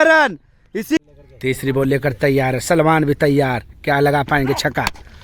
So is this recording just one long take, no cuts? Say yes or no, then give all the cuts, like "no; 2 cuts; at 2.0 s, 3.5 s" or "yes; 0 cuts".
no; 1 cut; at 1.0 s